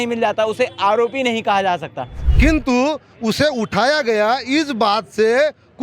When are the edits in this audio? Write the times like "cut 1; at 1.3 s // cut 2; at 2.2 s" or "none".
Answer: cut 1; at 2.1 s